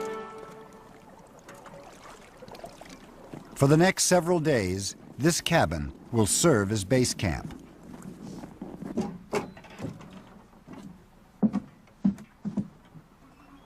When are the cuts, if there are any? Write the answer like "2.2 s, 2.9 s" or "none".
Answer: 12.3 s

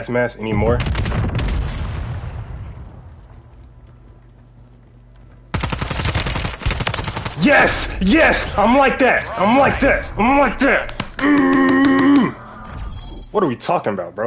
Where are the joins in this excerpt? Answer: none

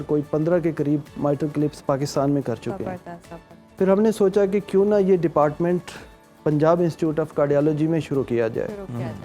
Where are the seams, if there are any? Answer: none

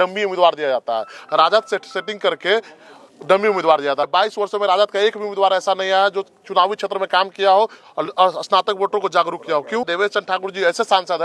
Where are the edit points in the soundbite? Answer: 4.0 s, 9.9 s

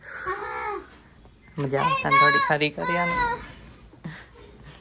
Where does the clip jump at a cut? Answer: none

